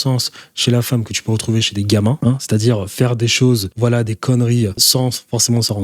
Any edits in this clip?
yes; 3 cuts; at 2.2 s, 3.7 s, 4.8 s

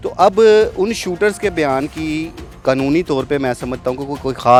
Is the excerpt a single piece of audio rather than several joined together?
yes; 0 cuts

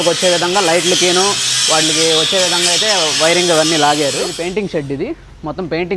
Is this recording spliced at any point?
yes; 1 cut; at 4.3 s

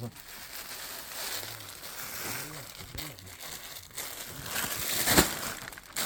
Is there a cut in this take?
no; 0 cuts

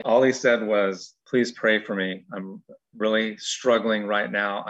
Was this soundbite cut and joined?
yes; 1 cut; at 1.1 s

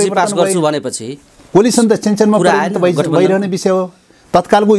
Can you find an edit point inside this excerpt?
no; 0 cuts

